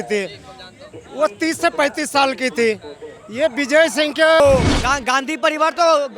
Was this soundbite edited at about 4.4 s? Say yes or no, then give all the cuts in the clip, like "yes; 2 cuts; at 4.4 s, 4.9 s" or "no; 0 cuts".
yes; 1 cut; at 4.4 s